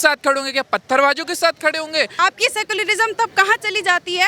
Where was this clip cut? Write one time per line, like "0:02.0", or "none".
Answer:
0:02.1

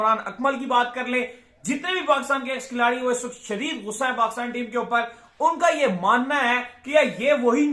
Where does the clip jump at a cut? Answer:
none

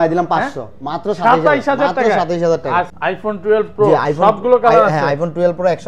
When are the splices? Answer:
0:02.9

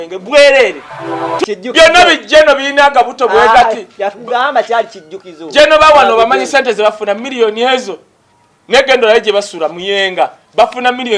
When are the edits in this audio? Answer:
0:01.4

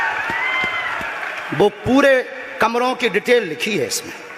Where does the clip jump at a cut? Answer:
none

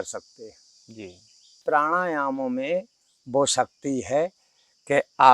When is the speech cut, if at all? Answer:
0:01.6

